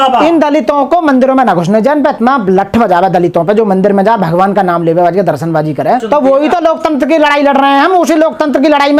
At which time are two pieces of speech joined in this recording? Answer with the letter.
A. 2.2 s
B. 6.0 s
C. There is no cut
B